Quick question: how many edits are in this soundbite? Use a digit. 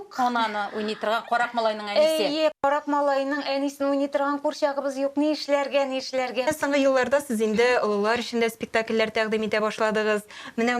1